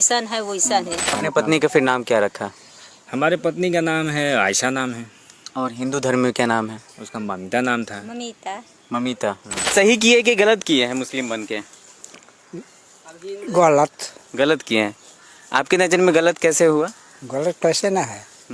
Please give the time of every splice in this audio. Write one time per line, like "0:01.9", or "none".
0:01.2
0:09.7

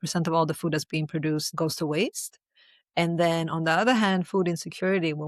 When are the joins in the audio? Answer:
0:01.5

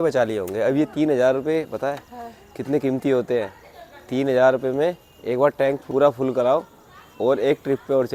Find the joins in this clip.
none

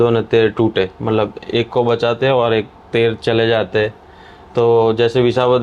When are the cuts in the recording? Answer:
none

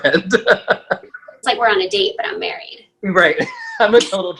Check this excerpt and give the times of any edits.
0:01.0

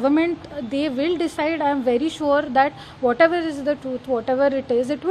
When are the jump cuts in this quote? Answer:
none

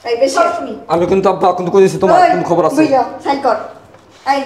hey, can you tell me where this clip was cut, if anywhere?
none

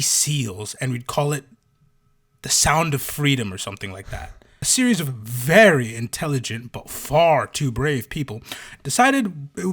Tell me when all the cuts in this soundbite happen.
0:04.6

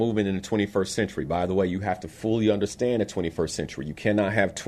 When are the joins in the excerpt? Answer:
none

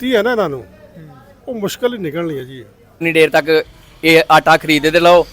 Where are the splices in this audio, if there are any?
0:03.0

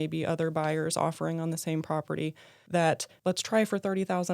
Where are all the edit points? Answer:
0:02.5
0:03.1

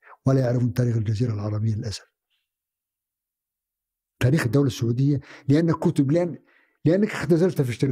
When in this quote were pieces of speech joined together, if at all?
none

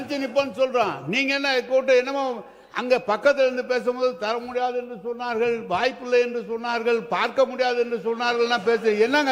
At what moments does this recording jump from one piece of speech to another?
none

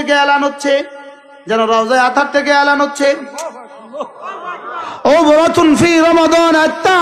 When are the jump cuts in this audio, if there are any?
none

